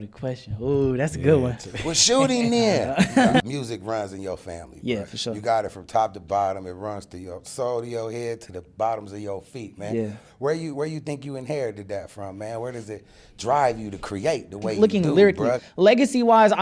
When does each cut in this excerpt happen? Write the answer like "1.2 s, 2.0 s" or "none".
3.4 s, 14.7 s